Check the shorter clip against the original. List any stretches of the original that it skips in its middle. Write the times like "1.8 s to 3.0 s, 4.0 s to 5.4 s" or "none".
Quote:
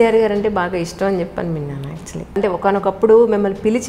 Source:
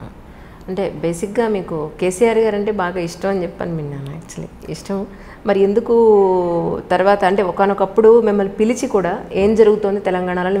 4.6 s to 7.3 s